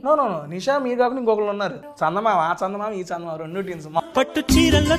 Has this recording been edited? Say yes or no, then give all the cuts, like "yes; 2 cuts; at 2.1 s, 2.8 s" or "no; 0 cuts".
yes; 2 cuts; at 1.8 s, 4.0 s